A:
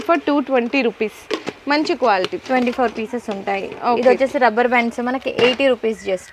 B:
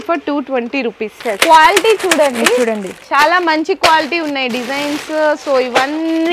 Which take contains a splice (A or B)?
B